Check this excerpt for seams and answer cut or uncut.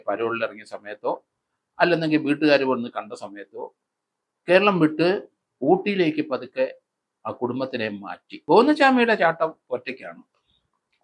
cut